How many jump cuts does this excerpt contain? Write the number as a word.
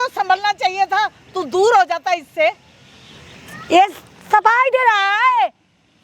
zero